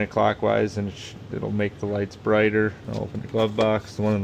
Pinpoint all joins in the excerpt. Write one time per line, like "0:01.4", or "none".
0:02.9